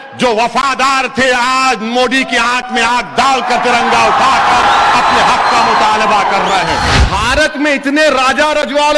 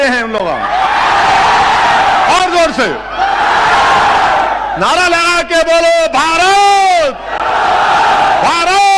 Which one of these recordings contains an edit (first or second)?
first